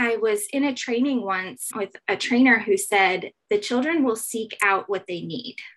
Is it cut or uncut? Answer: cut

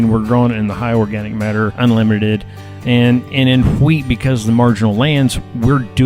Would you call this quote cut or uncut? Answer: cut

